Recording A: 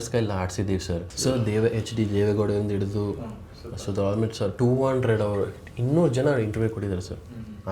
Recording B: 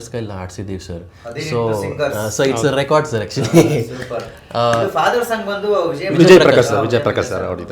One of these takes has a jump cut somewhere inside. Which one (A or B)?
A